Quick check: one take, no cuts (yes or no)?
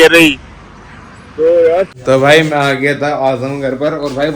no